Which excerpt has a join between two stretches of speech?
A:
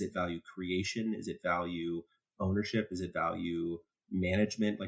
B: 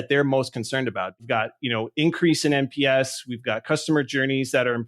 B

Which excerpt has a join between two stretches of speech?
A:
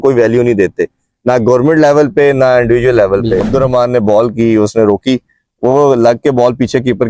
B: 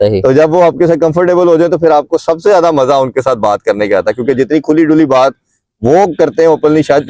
A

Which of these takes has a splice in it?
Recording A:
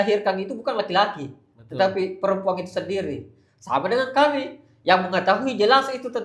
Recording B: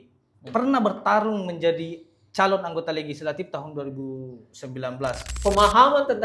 B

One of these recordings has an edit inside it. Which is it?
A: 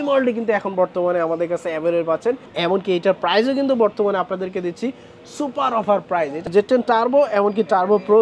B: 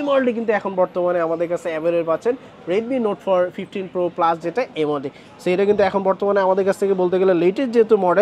A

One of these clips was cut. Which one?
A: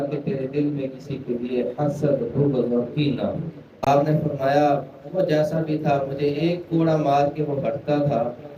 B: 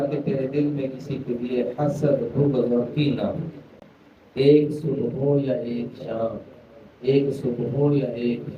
A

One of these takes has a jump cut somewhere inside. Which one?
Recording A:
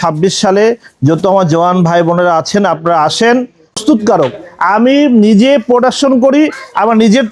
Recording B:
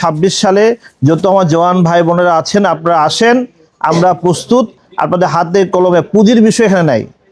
A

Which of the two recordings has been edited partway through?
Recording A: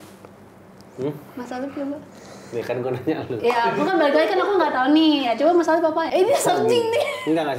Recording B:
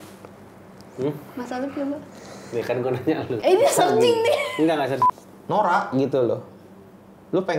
B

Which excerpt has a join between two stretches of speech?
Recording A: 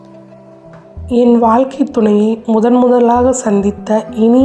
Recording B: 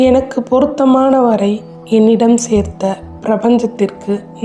A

